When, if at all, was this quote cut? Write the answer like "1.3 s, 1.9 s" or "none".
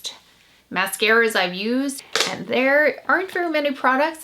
2.0 s